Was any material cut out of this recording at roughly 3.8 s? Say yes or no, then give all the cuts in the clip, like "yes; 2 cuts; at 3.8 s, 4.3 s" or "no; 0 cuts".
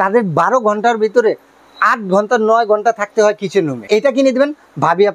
yes; 1 cut; at 3.8 s